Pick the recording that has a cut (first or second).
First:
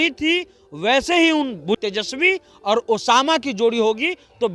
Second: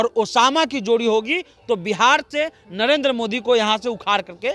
first